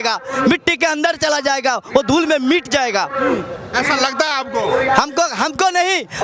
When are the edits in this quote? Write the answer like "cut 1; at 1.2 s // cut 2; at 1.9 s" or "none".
none